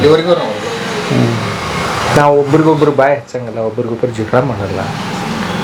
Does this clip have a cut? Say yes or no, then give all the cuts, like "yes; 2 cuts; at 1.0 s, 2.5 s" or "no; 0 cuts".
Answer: no; 0 cuts